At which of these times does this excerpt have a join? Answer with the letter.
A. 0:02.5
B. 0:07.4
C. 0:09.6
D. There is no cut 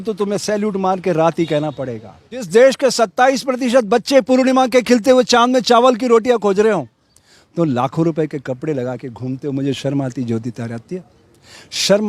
A